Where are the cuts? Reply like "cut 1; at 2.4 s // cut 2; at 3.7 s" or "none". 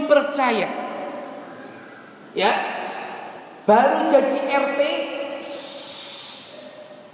none